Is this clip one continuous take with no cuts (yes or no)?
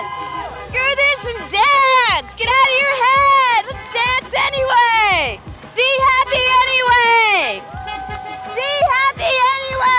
yes